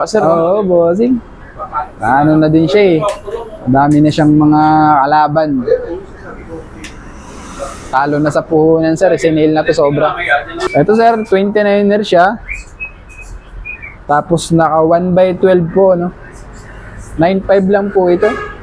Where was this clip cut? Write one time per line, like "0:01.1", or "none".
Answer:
none